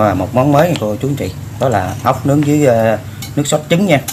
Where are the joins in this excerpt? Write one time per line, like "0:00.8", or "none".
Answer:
none